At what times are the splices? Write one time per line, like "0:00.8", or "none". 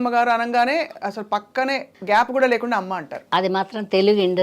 0:01.9